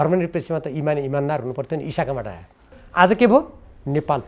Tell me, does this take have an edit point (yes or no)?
yes